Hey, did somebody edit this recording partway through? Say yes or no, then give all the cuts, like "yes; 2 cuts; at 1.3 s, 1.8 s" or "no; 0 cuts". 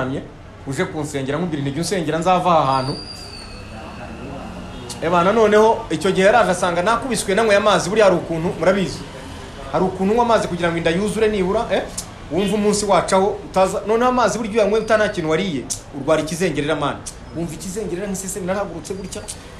no; 0 cuts